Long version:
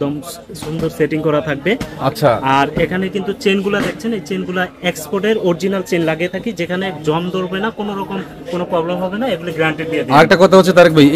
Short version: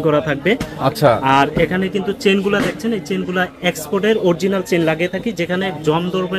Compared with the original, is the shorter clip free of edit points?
yes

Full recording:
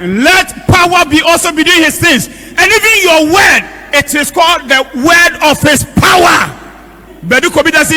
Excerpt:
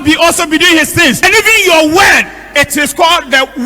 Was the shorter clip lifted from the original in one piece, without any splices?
no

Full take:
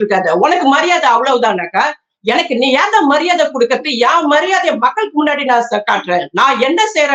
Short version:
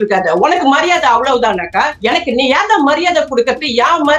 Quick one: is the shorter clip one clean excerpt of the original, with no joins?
no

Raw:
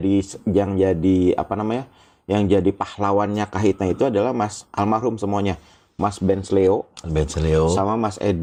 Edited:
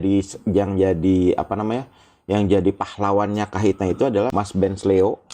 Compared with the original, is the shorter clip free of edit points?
no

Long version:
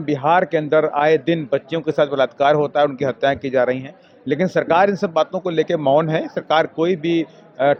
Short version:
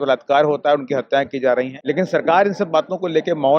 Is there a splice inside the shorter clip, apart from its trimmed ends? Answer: yes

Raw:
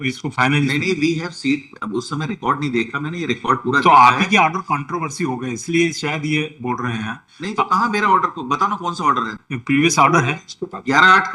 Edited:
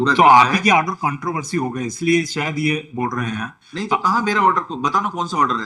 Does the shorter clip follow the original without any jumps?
yes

